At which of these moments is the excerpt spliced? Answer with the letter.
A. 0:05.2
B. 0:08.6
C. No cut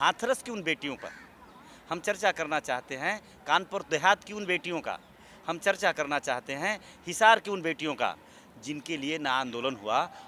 C